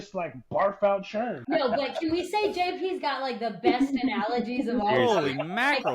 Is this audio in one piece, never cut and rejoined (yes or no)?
no